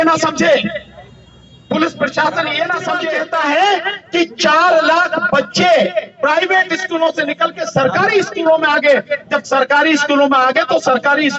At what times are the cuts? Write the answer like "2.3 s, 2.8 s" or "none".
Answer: 3.0 s